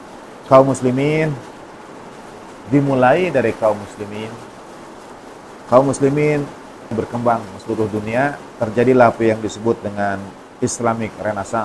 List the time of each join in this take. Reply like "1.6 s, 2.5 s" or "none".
6.9 s